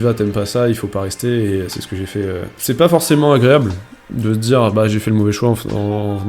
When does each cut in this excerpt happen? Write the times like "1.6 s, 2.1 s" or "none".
2.6 s